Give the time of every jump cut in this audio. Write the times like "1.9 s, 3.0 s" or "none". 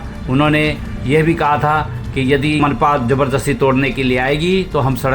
2.6 s